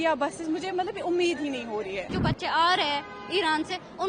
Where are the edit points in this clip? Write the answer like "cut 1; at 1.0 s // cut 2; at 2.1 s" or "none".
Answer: cut 1; at 2.1 s